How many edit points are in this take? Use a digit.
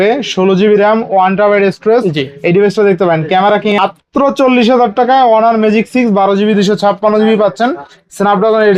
1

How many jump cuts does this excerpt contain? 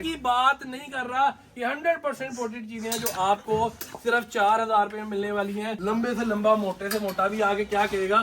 1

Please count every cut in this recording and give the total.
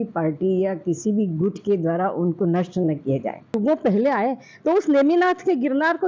1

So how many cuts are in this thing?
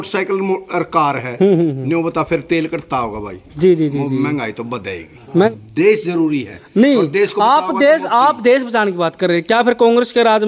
1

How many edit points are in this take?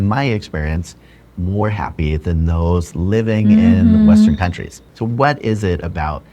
1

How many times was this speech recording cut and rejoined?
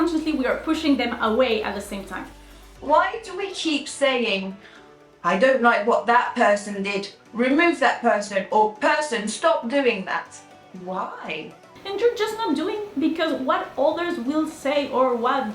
2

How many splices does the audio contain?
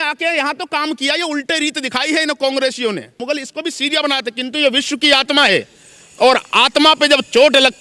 1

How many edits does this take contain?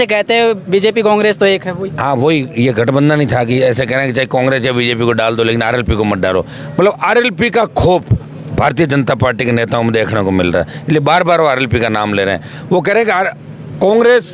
0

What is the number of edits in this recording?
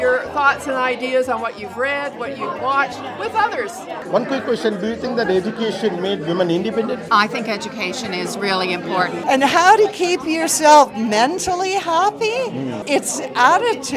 3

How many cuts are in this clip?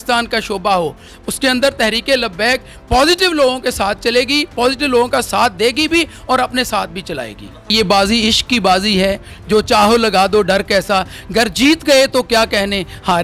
1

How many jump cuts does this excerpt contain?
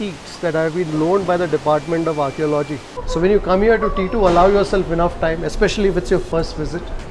1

